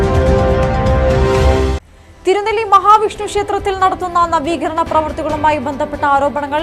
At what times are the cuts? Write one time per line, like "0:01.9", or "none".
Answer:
0:01.9